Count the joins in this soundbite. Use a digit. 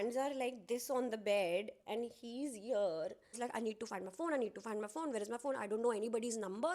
1